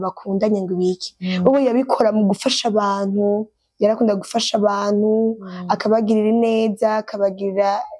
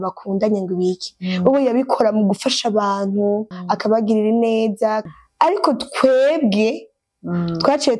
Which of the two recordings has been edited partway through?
second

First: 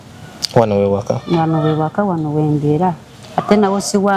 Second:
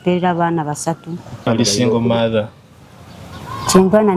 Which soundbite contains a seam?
second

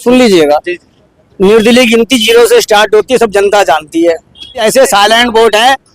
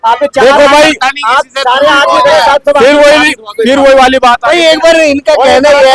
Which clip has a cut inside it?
first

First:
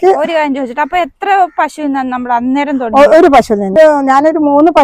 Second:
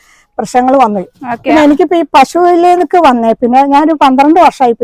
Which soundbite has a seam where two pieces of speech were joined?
first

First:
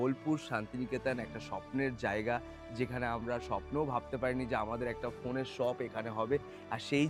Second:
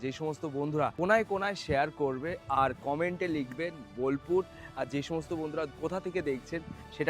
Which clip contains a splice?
second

